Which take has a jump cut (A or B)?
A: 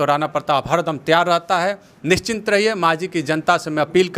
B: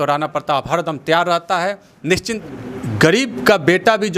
B